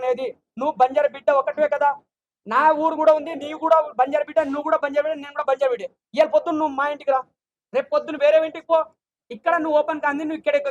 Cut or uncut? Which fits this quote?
uncut